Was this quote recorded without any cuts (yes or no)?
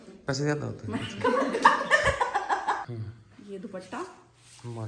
no